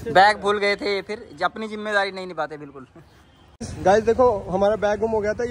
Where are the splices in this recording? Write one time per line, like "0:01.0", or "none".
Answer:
0:03.6